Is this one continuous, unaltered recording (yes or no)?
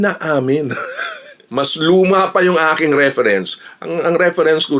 no